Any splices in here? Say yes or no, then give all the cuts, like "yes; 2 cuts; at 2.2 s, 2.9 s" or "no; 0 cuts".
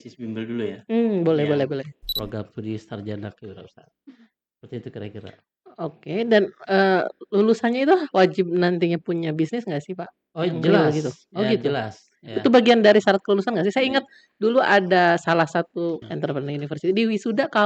yes; 2 cuts; at 2.0 s, 16.1 s